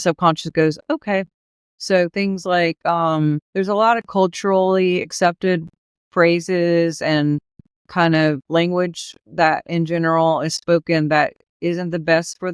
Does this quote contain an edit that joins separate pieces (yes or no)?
yes